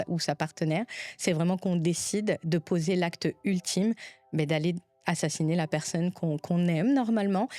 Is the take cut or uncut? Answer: uncut